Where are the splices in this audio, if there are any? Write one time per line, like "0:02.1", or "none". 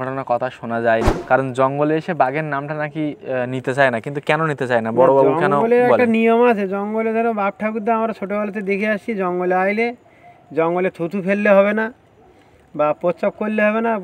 0:01.2

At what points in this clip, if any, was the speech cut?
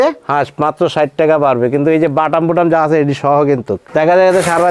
0:03.8

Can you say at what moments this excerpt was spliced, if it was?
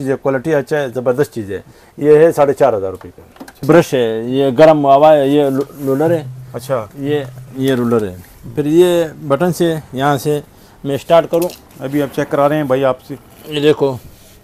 0:03.6

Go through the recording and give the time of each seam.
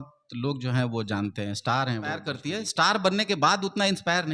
0:02.3

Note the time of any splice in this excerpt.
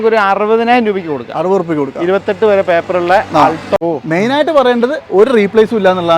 0:03.8

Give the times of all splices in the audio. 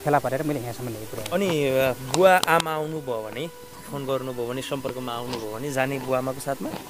0:01.3

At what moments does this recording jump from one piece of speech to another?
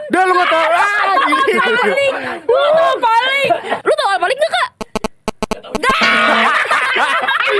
0:03.7

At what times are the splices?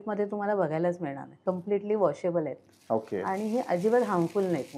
0:01.4

